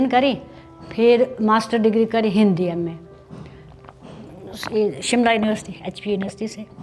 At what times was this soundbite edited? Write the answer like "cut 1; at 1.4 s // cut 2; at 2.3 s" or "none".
none